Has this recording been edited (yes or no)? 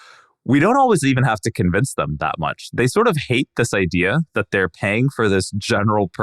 no